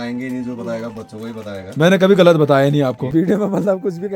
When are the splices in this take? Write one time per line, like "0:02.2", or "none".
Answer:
0:03.0